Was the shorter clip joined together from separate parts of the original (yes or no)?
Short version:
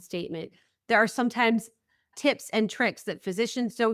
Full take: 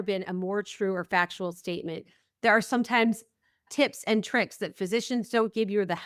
no